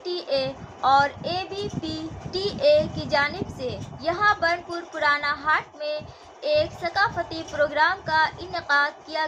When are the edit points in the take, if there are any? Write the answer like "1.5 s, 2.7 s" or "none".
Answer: none